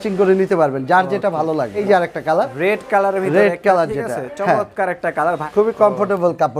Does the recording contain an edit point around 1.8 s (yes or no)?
yes